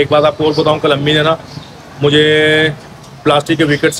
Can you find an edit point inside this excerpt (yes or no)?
no